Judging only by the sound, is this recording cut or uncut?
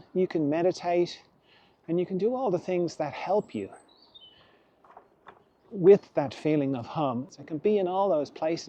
cut